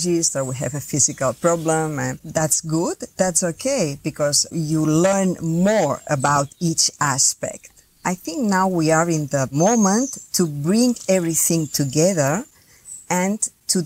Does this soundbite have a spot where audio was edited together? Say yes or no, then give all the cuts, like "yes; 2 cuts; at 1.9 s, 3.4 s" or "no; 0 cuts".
yes; 1 cut; at 9.5 s